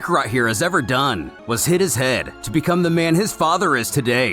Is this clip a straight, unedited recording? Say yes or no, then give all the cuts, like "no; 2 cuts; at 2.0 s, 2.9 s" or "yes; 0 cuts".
no; 1 cut; at 1.3 s